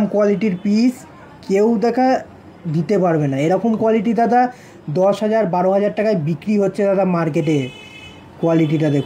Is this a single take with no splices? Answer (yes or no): yes